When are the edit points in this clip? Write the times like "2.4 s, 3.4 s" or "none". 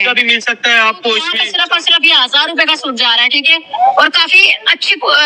1.4 s